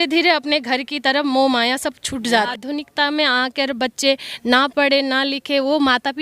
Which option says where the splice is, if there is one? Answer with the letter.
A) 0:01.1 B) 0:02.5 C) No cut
B